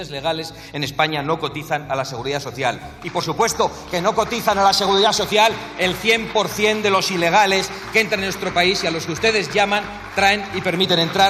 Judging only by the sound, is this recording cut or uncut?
uncut